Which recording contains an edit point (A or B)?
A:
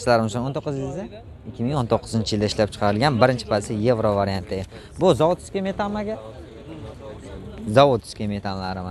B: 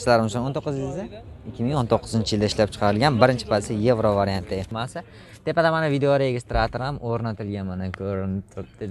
B